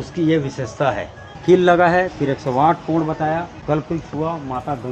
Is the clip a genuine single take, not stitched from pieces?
no; 2 cuts; at 1.3 s, 3.6 s

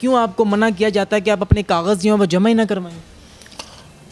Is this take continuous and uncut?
yes; 0 cuts

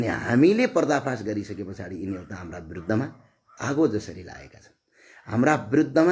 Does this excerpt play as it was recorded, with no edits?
yes; 0 cuts

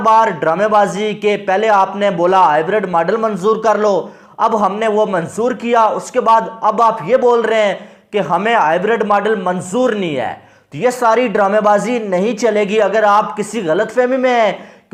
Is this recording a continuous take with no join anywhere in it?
yes; 0 cuts

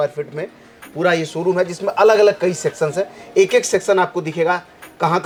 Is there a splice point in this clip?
no; 0 cuts

